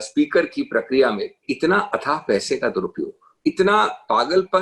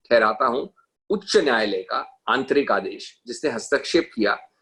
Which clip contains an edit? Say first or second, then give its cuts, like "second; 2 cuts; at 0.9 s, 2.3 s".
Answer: first; 2 cuts; at 1.5 s, 3.2 s